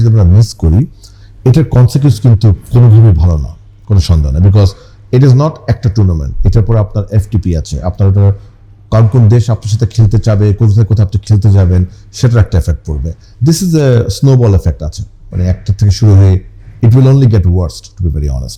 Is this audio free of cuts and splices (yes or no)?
yes